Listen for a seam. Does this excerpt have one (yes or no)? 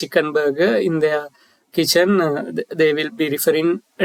no